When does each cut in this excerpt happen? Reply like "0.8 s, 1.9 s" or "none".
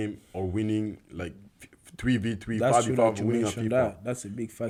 none

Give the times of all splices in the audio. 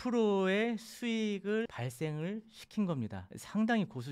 none

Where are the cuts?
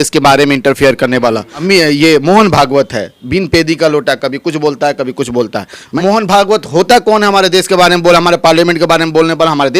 1.5 s, 5.8 s

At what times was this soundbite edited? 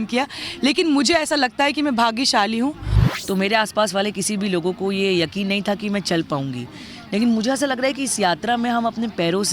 2.9 s

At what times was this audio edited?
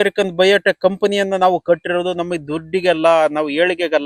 none

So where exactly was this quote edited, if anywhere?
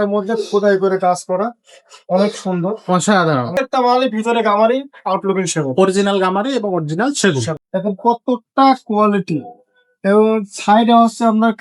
3.5 s, 7.6 s

